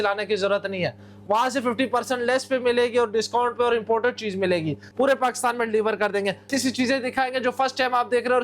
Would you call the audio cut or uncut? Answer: cut